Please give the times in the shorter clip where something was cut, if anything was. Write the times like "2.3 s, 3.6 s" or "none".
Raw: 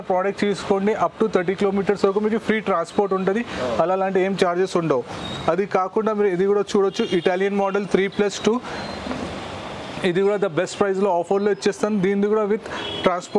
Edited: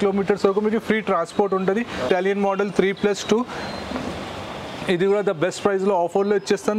2.1 s